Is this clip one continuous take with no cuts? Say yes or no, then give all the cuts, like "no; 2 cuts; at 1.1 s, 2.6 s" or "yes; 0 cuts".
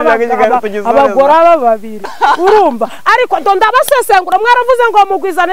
no; 1 cut; at 2.1 s